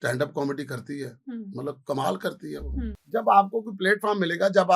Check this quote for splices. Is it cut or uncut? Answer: cut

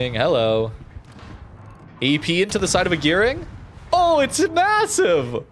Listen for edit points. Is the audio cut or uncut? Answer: uncut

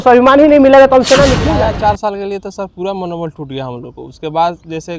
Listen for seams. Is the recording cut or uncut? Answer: cut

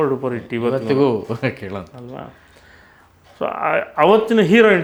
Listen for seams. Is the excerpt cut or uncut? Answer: uncut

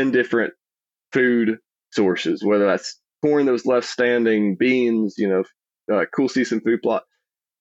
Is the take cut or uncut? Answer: uncut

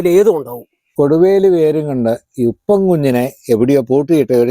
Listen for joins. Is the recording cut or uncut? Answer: cut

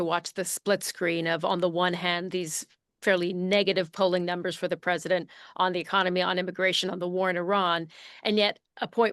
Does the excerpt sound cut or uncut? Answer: uncut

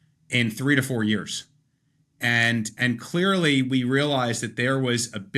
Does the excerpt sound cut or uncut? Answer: uncut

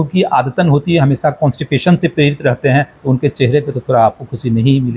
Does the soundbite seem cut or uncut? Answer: uncut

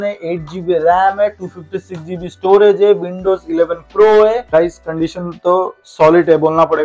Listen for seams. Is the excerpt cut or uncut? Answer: cut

